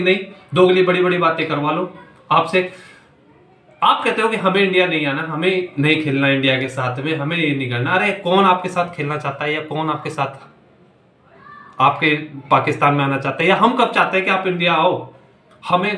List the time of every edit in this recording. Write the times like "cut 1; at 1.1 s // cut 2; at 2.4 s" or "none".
none